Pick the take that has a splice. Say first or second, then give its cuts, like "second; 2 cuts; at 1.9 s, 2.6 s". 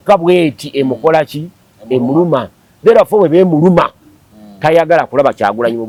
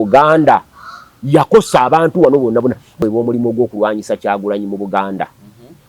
second; 1 cut; at 3.0 s